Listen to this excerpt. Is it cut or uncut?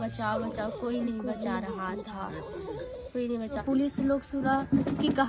cut